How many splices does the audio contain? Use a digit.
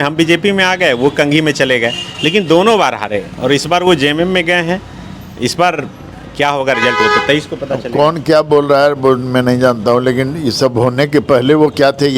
0